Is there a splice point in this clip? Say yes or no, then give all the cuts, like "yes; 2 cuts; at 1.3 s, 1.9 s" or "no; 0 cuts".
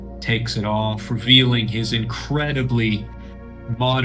no; 0 cuts